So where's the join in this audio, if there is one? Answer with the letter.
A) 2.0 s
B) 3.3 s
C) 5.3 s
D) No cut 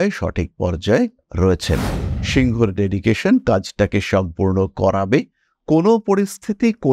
A